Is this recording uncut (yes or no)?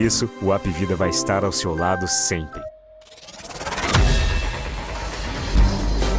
no